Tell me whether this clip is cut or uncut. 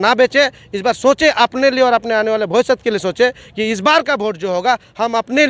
uncut